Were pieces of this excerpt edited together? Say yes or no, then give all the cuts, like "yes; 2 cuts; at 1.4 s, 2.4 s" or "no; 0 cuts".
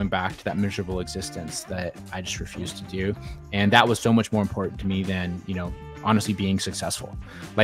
no; 0 cuts